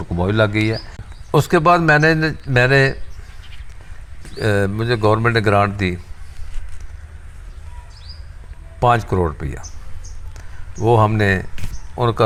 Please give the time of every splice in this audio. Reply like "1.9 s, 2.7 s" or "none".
none